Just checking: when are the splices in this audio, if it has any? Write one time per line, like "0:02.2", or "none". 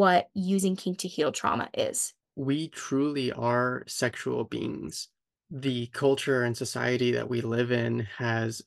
0:02.3